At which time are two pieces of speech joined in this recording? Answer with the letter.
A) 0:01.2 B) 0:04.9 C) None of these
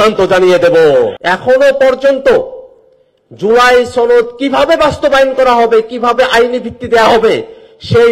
A